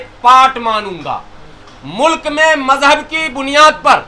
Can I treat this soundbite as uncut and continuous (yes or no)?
yes